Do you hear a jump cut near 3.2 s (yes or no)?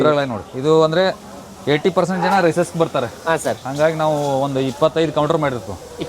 no